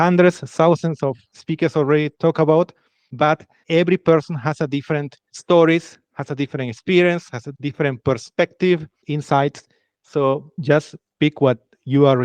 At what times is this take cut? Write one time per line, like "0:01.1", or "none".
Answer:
none